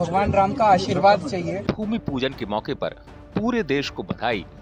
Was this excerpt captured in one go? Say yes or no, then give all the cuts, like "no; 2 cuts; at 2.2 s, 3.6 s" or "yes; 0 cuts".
no; 1 cut; at 1.6 s